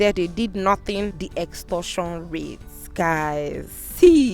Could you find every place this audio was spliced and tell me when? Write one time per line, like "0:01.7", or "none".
0:01.2